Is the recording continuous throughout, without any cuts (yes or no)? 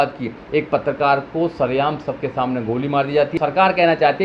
no